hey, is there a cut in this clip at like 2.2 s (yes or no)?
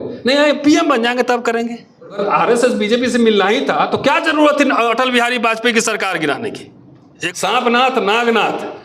yes